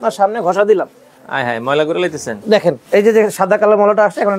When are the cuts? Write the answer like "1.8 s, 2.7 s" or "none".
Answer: 2.8 s